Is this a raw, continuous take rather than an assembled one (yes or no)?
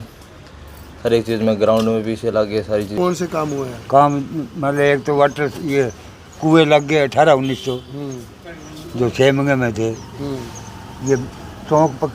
no